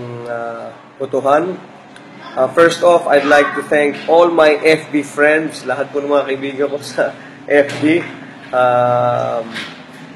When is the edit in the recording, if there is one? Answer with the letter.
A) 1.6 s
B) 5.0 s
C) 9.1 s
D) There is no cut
D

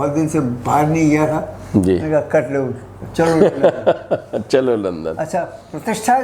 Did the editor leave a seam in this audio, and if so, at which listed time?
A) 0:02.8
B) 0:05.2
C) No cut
B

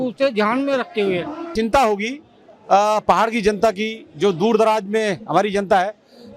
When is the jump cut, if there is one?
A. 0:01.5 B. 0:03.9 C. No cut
A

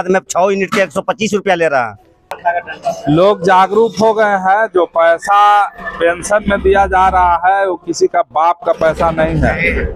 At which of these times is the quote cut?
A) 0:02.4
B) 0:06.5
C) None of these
A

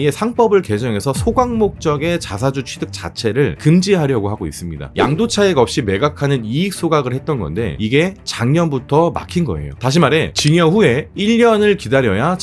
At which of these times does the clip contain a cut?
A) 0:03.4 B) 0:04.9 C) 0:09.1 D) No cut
B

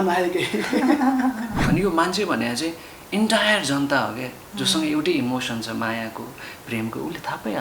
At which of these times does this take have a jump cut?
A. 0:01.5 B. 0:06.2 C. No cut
A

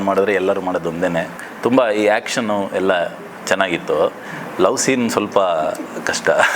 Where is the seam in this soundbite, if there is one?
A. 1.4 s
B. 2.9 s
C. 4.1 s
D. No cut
A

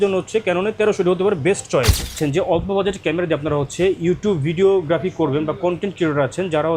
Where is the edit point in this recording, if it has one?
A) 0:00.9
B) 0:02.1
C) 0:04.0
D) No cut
B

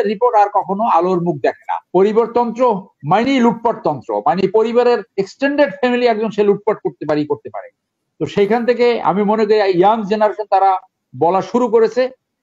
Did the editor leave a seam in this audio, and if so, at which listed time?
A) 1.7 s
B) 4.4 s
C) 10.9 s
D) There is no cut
A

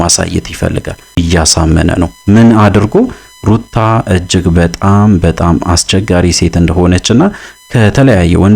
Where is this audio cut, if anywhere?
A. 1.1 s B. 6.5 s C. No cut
A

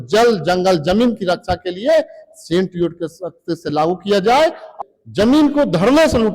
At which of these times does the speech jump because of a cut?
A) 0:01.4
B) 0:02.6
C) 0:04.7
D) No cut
C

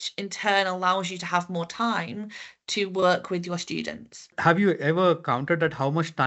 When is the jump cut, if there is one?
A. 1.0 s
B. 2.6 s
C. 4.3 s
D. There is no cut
C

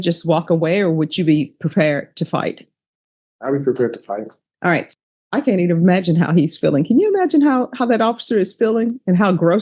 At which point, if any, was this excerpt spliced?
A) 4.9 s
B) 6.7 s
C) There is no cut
A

